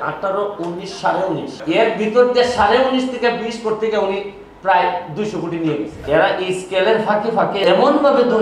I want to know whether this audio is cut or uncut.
cut